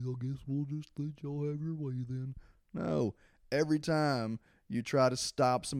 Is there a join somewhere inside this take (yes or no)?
no